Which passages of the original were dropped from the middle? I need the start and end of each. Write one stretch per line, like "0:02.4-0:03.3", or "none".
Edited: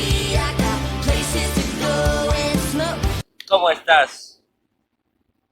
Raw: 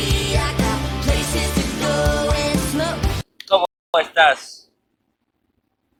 0:03.6-0:03.9